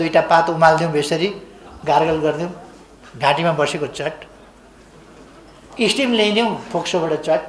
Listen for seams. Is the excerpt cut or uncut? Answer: uncut